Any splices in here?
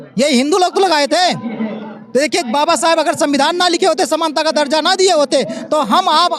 no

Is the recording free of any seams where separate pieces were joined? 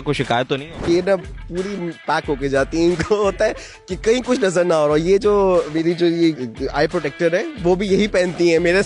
no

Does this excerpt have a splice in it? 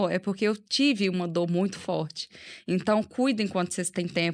no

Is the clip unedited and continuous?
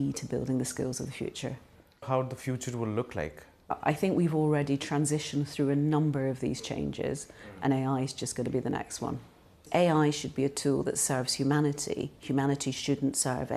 no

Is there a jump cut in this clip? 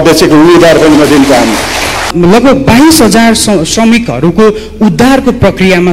yes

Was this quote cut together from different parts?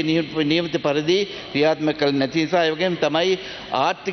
no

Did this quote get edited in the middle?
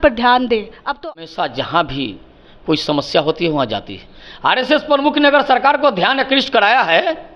yes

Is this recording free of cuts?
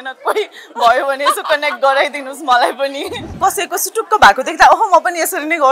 no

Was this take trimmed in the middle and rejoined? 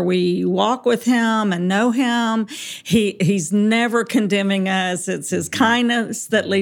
no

